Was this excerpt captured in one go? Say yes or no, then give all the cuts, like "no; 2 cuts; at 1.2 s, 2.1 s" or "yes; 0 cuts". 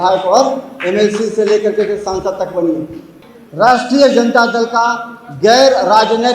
no; 1 cut; at 3.0 s